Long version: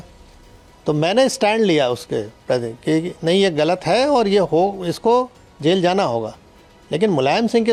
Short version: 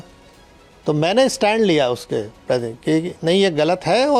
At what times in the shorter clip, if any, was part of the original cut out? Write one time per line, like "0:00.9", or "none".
none